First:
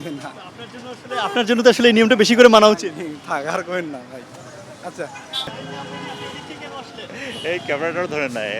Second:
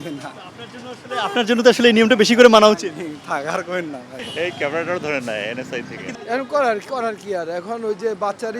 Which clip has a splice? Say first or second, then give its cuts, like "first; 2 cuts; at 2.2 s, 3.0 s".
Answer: second; 2 cuts; at 4.2 s, 6.1 s